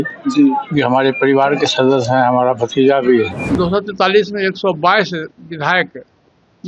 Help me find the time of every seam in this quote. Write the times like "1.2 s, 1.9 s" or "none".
3.4 s